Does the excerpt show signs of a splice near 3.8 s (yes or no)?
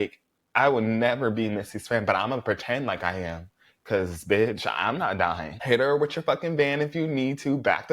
no